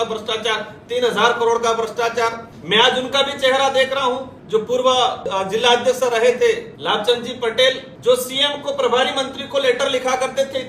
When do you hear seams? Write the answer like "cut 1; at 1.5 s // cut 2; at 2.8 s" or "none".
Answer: cut 1; at 2.5 s // cut 2; at 4.3 s // cut 3; at 5.2 s // cut 4; at 6.7 s // cut 5; at 8.1 s